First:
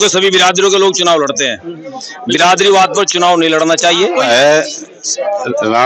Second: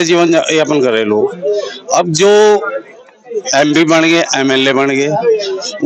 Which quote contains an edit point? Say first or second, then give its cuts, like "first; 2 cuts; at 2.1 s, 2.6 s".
first; 1 cut; at 4.3 s